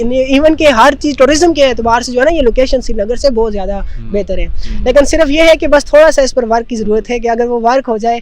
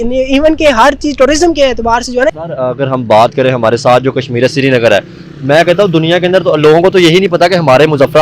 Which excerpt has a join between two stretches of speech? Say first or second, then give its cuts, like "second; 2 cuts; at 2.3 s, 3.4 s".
second; 1 cut; at 2.3 s